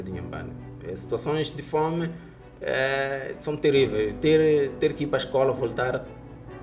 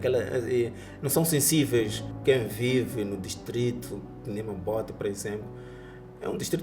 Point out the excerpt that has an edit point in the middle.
second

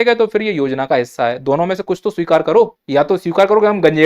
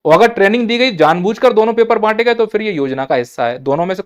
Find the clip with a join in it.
first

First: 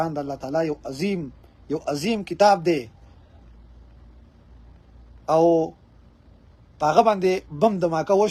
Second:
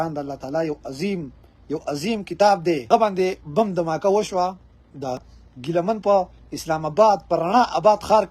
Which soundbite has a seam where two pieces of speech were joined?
second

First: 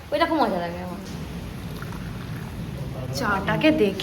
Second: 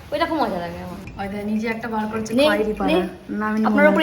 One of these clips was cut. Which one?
second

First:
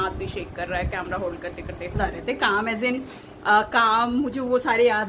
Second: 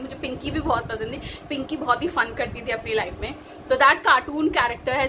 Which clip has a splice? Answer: first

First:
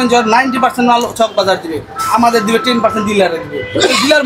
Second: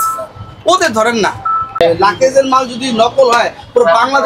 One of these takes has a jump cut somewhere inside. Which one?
second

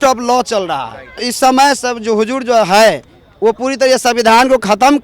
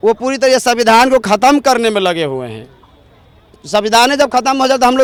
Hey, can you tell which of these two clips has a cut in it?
first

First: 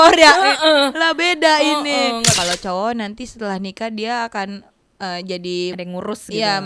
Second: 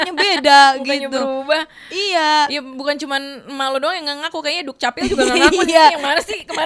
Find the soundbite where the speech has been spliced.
first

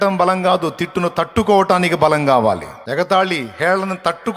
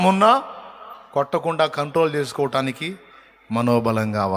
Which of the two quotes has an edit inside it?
first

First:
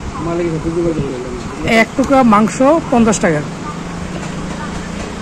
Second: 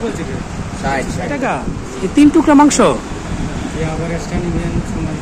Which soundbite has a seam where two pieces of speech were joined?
second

